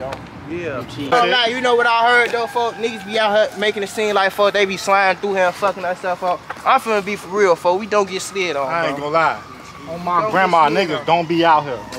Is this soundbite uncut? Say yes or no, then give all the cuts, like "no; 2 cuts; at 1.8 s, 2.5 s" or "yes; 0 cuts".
no; 1 cut; at 1.1 s